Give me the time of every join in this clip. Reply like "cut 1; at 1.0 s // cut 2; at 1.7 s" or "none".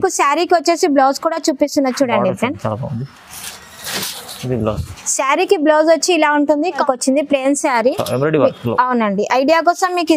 cut 1; at 6.8 s